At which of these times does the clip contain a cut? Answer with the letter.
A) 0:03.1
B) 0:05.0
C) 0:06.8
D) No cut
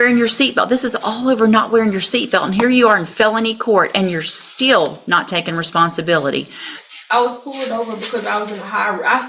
C